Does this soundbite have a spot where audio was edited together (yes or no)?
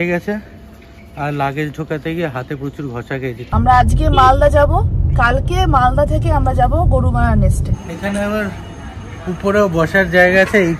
yes